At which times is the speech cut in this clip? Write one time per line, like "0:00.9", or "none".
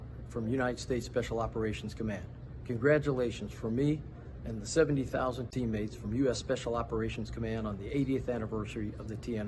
none

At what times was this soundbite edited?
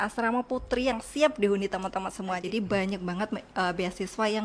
0:02.4

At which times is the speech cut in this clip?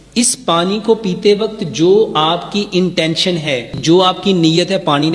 0:03.8

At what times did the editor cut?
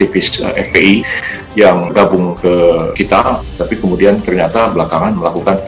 0:01.7
0:03.1

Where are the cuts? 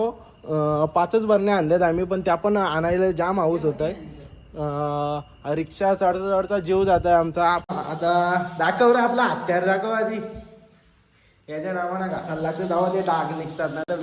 0:07.7

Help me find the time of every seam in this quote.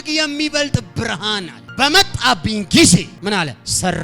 0:01.6
0:03.1

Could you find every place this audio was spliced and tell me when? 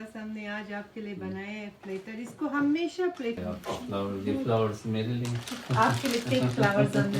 0:03.4

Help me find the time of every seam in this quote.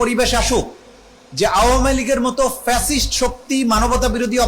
none

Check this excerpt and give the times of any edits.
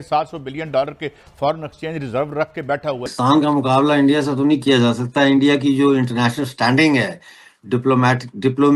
0:03.1

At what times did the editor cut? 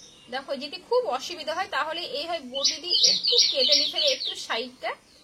none

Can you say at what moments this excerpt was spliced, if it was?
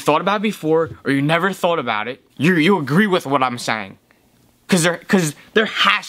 0:02.2

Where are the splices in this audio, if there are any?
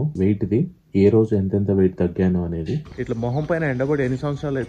0:02.8

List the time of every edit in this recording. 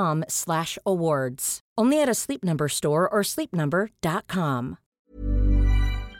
0:05.0

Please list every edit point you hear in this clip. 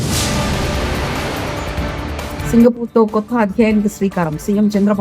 0:02.4

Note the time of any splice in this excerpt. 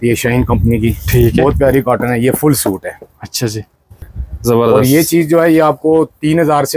0:03.9

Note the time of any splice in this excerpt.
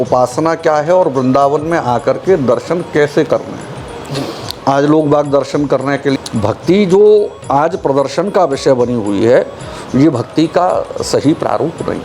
0:06.2

